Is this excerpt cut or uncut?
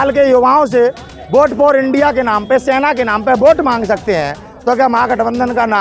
uncut